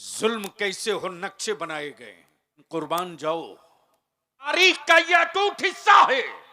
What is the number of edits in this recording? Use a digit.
2